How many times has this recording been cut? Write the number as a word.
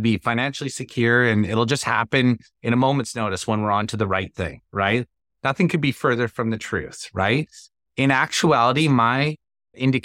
zero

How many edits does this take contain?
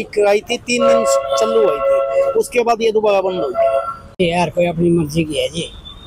one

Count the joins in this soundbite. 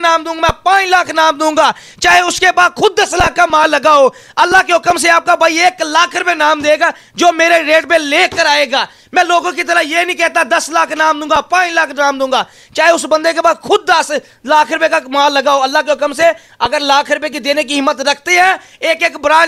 zero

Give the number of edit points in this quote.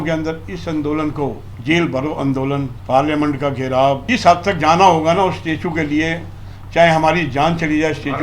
three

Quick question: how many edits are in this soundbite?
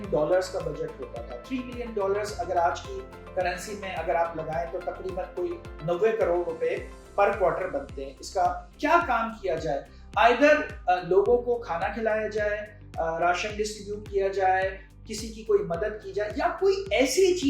one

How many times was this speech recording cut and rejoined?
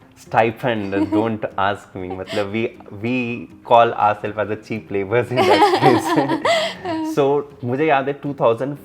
zero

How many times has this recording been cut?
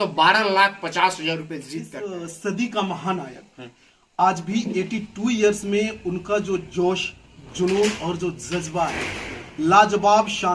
one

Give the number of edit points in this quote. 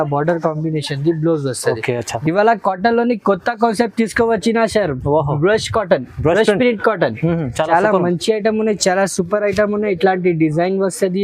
one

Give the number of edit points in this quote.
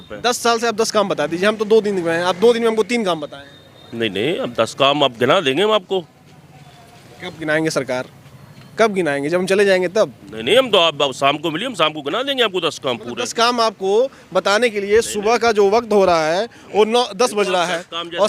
zero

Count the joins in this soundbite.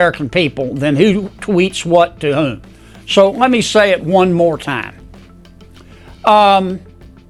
zero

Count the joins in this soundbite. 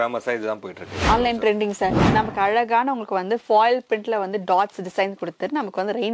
one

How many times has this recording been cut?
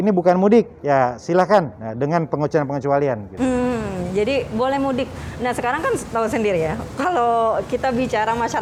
zero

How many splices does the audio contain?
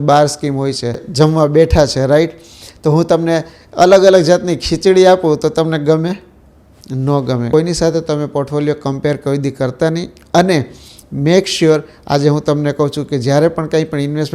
two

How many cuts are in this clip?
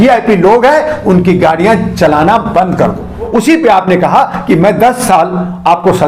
one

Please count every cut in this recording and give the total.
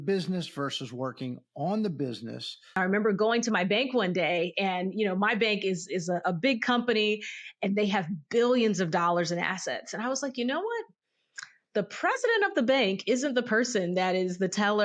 one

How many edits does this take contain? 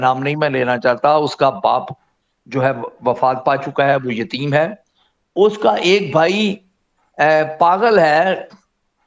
zero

